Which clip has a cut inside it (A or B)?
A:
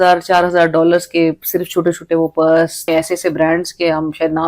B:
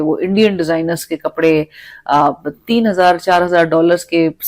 A